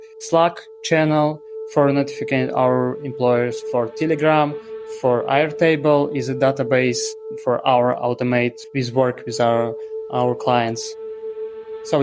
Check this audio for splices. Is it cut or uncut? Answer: cut